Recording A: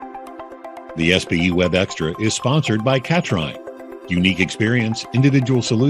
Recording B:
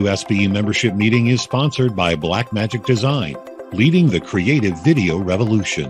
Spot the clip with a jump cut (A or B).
A